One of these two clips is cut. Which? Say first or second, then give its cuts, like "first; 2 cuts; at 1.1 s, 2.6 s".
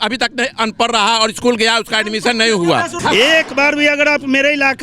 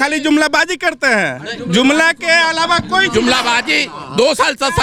first; 1 cut; at 2.9 s